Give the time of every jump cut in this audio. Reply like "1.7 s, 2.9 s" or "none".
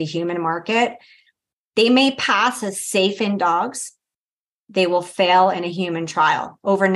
none